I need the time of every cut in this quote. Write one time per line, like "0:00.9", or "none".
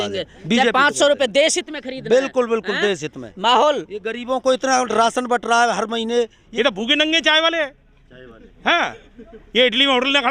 0:06.4